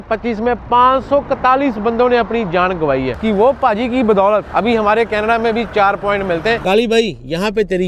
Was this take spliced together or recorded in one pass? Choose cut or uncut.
cut